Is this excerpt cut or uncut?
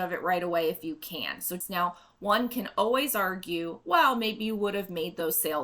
cut